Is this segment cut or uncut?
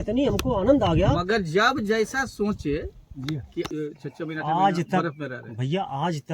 cut